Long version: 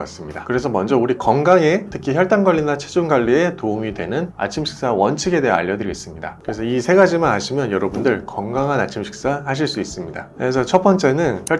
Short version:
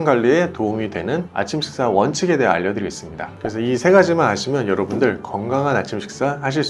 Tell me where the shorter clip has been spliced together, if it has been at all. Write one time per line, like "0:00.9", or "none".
none